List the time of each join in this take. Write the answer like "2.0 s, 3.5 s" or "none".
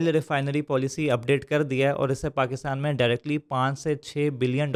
none